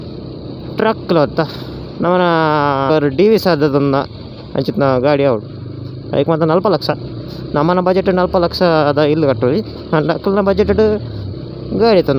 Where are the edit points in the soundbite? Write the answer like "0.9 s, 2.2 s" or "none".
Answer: 2.9 s